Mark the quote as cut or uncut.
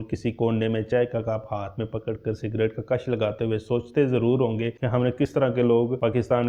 uncut